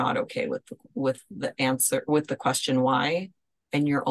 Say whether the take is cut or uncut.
uncut